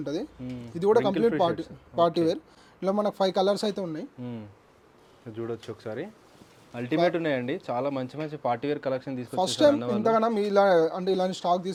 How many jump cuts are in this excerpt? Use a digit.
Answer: 0